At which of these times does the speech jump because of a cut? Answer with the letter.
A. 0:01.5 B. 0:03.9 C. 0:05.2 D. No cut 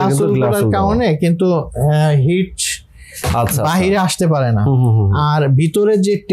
D